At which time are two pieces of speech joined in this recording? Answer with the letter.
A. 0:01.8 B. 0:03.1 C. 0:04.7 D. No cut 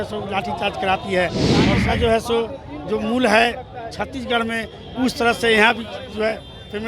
A